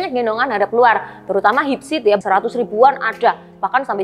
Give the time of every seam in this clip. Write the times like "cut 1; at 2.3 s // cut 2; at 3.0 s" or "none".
cut 1; at 2.2 s

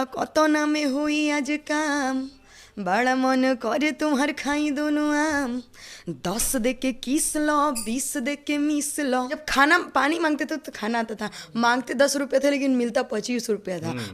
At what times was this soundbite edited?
cut 1; at 9.4 s

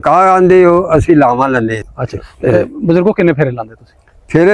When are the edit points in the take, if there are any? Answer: cut 1; at 1.8 s

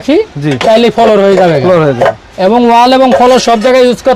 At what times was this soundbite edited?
none

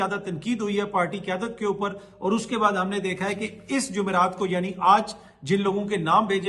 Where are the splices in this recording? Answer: none

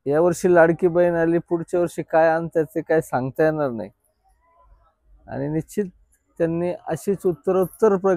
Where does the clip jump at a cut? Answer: none

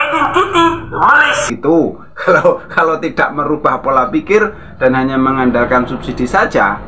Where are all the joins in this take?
cut 1; at 1.5 s

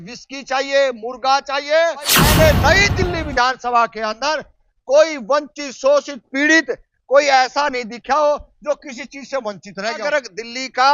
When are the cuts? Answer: cut 1; at 2.2 s // cut 2; at 10.0 s

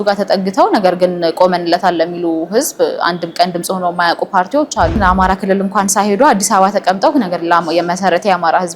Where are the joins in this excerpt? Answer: cut 1; at 5.0 s

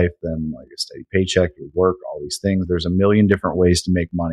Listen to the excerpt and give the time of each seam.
none

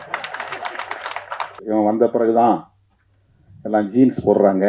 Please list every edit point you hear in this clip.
cut 1; at 1.6 s

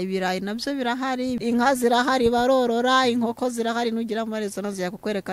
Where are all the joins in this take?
cut 1; at 1.4 s

